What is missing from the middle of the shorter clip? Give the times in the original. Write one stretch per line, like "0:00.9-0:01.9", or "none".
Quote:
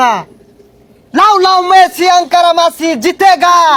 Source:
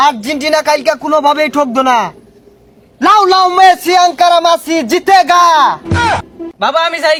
none